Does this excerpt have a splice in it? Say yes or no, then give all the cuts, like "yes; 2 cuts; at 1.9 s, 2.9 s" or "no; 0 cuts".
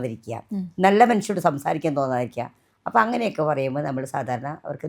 no; 0 cuts